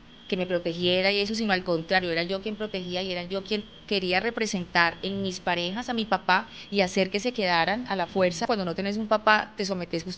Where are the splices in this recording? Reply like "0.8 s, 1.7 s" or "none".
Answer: 8.4 s